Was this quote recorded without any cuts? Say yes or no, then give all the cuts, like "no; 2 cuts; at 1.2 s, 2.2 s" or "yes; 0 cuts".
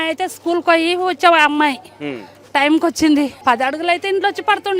no; 1 cut; at 3.3 s